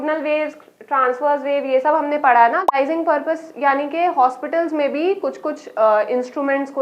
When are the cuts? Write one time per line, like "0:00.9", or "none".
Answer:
0:02.7